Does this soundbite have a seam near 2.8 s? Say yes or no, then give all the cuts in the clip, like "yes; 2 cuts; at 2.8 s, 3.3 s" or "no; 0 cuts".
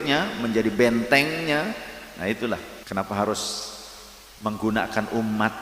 yes; 1 cut; at 2.8 s